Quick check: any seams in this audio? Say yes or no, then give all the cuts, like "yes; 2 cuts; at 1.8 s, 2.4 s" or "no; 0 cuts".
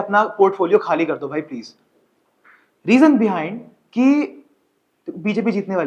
no; 0 cuts